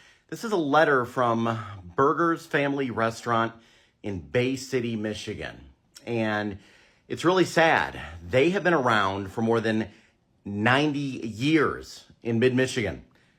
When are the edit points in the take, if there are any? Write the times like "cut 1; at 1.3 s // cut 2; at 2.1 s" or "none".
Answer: none